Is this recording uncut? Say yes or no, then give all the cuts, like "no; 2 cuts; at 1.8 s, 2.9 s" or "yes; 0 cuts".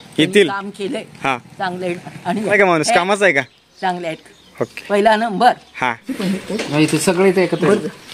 yes; 0 cuts